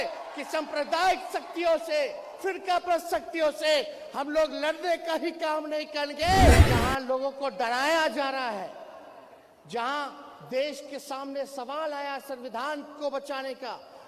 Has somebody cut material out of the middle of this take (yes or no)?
yes